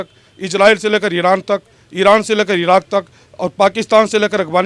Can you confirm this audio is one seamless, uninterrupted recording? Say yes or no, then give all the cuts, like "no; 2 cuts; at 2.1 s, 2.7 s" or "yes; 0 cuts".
yes; 0 cuts